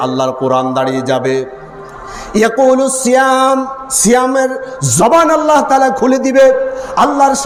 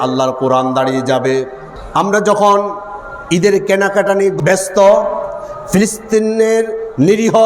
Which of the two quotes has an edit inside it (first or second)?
second